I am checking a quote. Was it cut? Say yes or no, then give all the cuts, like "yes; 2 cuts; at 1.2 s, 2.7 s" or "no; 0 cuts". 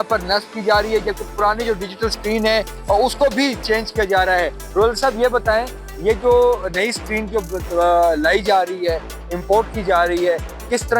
no; 0 cuts